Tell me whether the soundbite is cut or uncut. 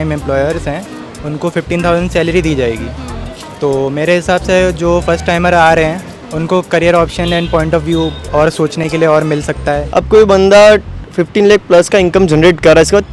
cut